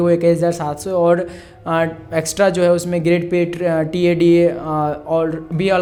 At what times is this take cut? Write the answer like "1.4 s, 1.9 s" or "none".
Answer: none